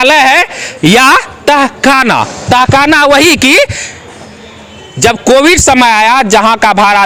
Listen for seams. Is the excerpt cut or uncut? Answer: uncut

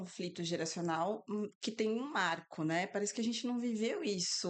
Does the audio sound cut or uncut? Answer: uncut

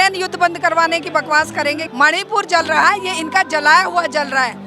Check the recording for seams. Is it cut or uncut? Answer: cut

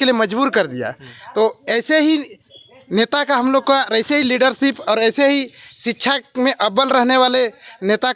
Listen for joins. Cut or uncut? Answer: uncut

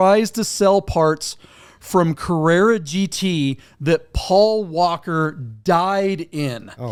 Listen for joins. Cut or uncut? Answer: uncut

